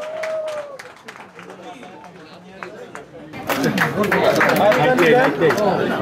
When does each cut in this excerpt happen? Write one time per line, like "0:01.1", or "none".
0:03.3